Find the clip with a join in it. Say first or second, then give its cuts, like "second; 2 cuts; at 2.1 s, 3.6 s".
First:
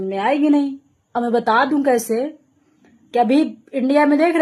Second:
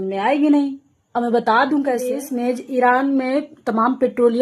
second; 1 cut; at 2.2 s